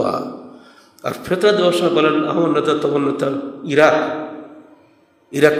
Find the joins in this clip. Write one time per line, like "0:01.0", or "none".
none